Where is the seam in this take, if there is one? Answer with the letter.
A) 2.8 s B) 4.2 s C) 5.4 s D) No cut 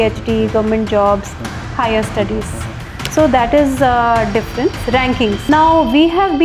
C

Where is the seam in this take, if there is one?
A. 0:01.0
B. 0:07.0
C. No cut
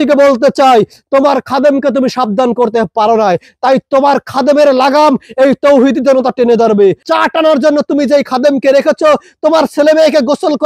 B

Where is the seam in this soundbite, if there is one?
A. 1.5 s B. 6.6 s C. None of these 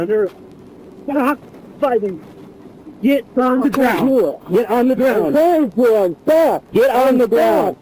B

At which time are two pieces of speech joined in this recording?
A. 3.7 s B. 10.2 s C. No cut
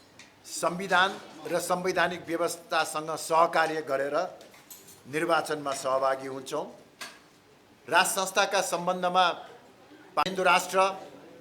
B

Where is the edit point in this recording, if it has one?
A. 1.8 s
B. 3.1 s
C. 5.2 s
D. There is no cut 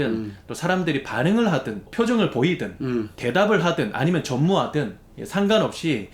A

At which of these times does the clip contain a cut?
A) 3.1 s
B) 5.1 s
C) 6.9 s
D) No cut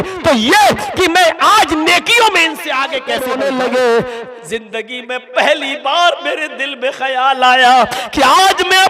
A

